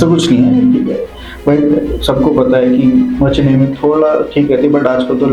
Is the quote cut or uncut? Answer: uncut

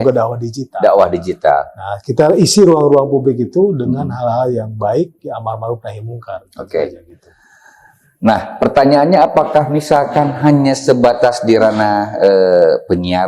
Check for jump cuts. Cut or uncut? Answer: uncut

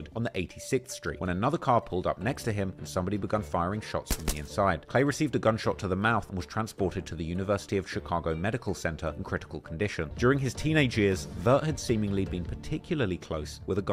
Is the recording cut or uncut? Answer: cut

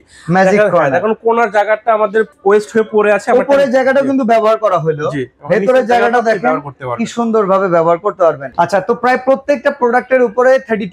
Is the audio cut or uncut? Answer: cut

